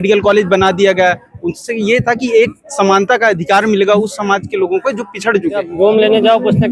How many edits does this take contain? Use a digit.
1